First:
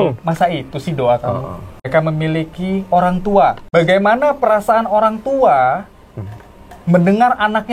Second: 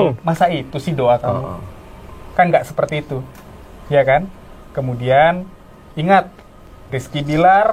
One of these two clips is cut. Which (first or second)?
first